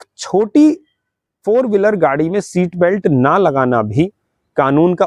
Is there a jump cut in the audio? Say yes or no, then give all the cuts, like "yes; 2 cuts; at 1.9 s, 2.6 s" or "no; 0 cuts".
no; 0 cuts